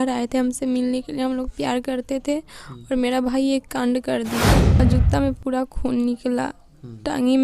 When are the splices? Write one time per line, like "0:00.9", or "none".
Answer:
0:04.8

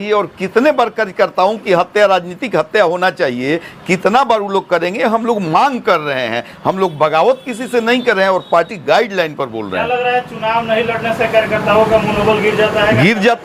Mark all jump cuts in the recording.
none

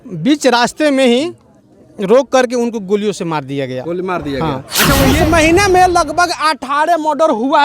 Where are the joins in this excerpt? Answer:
0:05.1

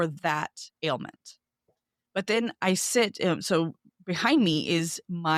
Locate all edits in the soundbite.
none

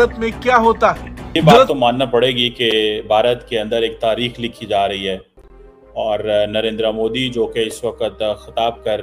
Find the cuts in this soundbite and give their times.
0:01.7

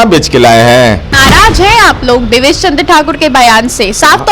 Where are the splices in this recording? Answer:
0:01.1

